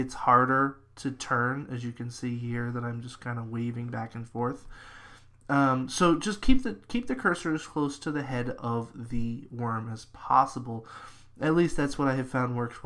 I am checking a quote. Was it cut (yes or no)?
yes